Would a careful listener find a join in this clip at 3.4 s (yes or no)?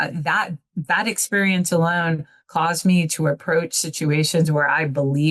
no